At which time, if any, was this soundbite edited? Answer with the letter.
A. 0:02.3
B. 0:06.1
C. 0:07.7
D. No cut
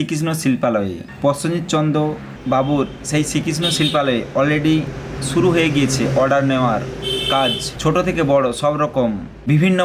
A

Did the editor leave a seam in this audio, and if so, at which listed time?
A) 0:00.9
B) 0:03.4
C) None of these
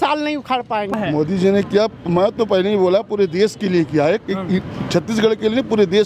A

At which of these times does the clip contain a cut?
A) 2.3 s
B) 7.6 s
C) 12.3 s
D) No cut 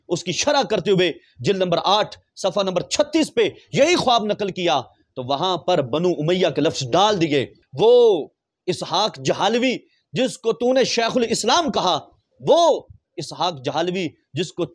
B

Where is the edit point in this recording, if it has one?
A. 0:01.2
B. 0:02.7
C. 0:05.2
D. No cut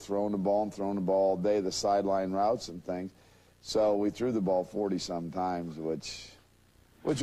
B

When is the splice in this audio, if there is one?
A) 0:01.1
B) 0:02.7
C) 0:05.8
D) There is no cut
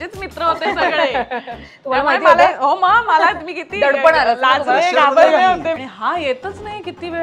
C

